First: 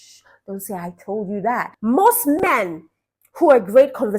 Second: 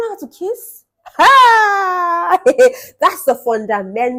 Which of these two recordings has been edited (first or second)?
first